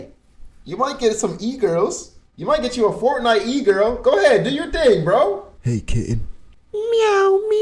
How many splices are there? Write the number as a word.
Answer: one